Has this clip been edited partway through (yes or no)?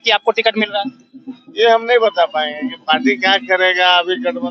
no